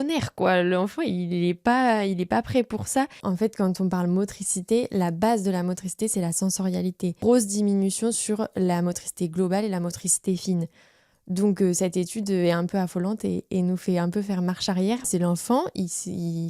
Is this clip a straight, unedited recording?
no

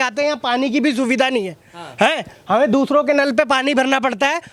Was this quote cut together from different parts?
no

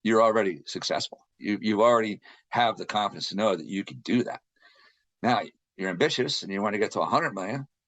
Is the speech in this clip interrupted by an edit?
yes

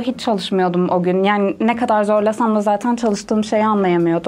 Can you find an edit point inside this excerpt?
no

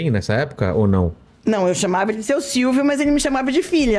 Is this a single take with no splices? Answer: yes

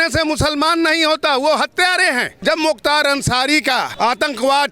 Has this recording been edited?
yes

